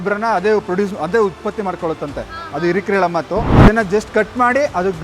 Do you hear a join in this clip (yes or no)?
yes